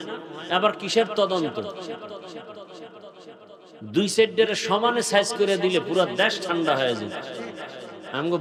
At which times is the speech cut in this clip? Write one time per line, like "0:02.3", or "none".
none